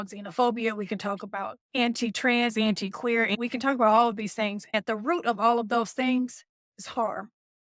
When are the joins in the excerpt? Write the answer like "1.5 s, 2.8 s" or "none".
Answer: 1.6 s